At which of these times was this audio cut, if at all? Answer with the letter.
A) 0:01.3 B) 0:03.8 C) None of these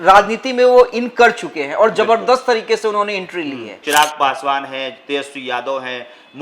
B